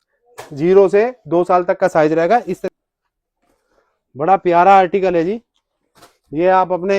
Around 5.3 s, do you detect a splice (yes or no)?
no